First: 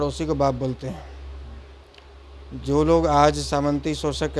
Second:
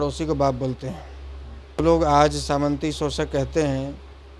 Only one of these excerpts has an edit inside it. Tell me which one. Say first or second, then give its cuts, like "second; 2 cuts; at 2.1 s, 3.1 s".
second; 1 cut; at 1.8 s